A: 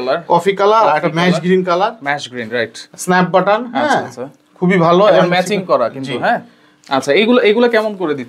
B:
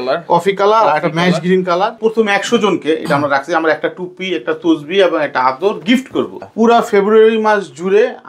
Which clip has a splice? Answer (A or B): B